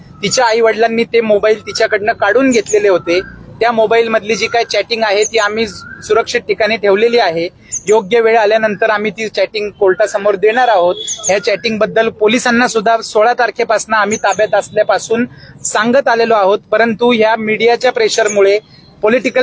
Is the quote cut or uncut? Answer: uncut